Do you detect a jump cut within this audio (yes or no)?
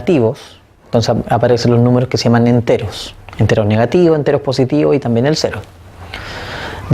yes